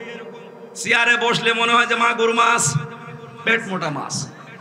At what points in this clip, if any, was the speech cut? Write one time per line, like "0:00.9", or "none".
none